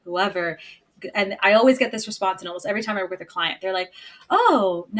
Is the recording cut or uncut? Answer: uncut